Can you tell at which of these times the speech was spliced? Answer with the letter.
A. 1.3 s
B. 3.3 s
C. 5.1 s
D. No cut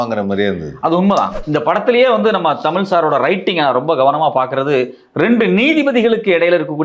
A